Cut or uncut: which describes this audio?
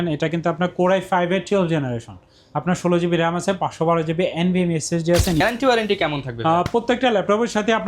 cut